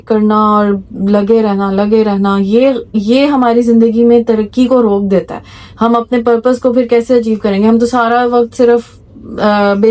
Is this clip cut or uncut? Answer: uncut